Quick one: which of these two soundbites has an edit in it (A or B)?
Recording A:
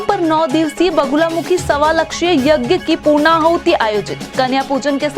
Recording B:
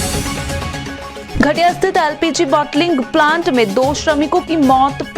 B